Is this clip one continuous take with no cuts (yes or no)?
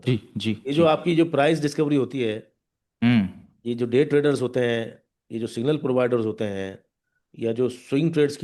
yes